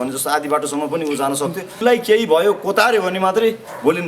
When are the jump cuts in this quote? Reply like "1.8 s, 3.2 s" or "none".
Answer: 1.8 s